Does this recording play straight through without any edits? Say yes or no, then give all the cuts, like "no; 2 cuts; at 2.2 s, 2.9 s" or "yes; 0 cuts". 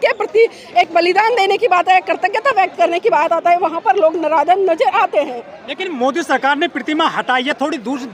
yes; 0 cuts